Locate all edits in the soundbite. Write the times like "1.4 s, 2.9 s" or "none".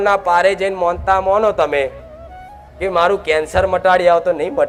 none